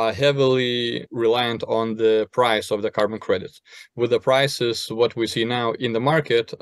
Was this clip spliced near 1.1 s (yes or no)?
yes